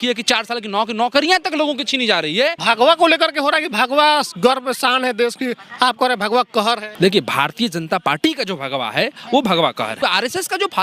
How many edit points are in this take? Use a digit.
3